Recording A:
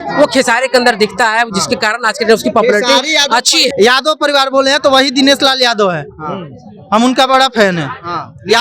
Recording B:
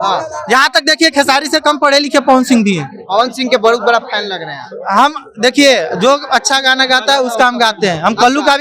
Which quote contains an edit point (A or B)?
A